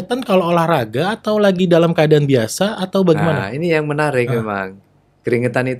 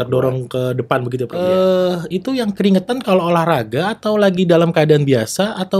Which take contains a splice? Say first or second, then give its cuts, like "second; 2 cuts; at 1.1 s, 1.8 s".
second; 1 cut; at 1.3 s